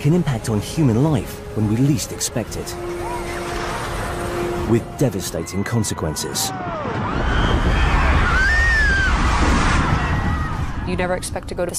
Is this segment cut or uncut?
cut